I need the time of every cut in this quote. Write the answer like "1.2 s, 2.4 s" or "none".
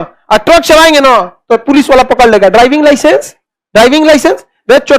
none